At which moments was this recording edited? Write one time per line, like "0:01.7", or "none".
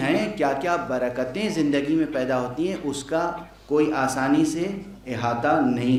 none